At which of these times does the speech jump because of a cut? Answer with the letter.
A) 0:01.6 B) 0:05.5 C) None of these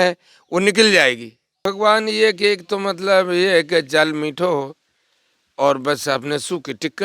A